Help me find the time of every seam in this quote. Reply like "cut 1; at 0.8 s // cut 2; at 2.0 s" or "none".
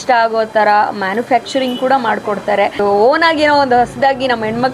cut 1; at 2.8 s